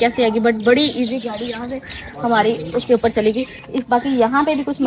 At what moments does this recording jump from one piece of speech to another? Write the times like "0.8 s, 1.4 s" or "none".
none